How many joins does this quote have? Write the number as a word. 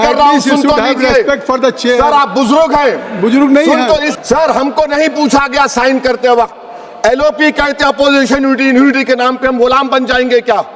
one